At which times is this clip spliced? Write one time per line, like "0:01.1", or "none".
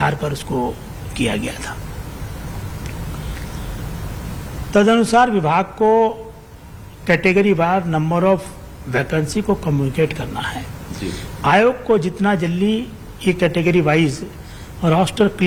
none